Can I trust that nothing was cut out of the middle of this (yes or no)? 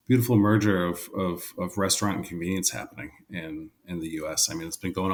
yes